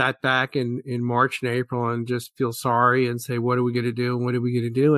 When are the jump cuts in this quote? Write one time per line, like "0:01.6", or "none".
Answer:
none